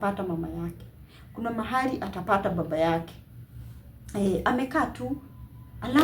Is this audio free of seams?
yes; 0 cuts

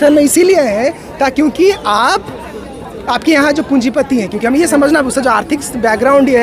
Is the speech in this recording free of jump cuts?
yes; 0 cuts

